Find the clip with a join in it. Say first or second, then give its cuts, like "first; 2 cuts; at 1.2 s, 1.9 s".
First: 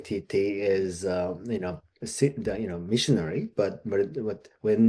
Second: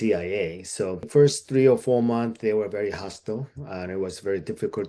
second; 1 cut; at 1.0 s